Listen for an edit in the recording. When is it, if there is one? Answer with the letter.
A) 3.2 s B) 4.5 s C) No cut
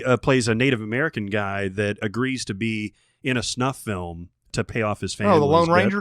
B